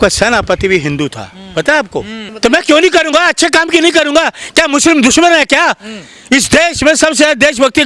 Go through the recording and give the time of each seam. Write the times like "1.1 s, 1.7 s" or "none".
2.3 s